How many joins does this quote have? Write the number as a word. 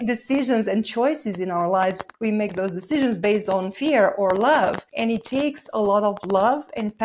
two